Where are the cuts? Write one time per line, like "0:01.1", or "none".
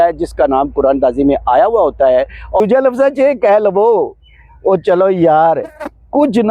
0:02.6